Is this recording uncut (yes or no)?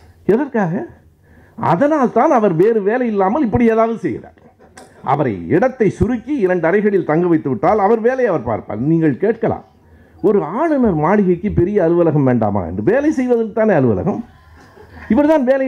yes